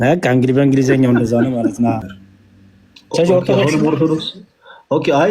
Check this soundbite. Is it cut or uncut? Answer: cut